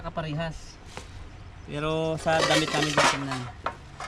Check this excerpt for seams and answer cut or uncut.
uncut